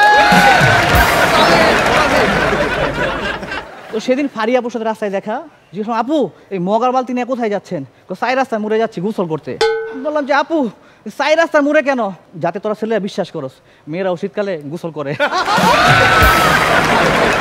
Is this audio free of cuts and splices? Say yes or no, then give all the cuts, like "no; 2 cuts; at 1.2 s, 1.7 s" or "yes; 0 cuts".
yes; 0 cuts